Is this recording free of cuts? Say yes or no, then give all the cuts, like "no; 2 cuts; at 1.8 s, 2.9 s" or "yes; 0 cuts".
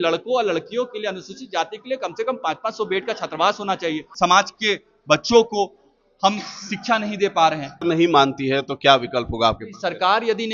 no; 2 cuts; at 4.0 s, 7.8 s